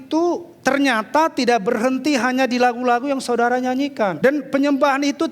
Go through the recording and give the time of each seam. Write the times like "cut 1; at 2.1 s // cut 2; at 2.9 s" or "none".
cut 1; at 4.2 s